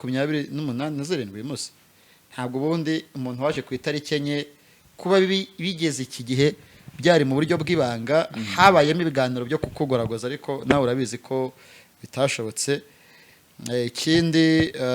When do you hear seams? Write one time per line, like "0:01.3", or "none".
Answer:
none